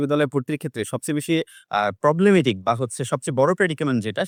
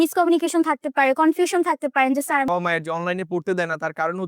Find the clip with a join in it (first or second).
second